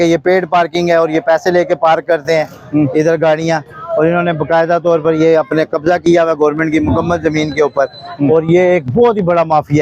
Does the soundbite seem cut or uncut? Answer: uncut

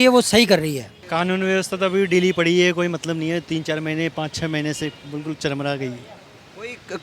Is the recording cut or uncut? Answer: cut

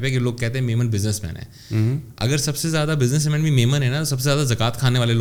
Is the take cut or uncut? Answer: uncut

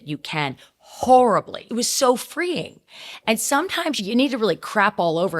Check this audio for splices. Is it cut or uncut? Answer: cut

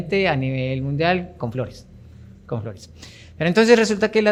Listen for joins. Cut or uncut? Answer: uncut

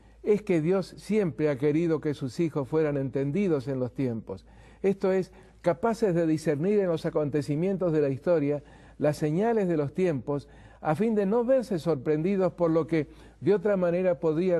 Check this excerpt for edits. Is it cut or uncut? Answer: uncut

